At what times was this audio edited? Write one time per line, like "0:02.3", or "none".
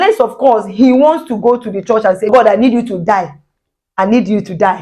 0:02.3